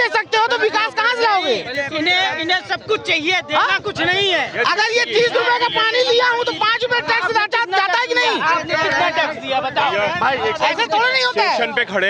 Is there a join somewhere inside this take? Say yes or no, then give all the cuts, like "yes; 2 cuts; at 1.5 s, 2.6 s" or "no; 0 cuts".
no; 0 cuts